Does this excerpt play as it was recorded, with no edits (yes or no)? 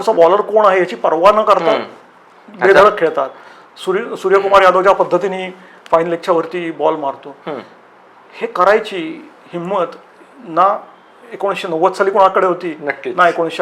yes